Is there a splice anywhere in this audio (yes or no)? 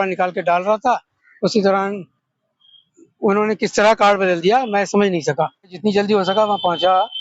yes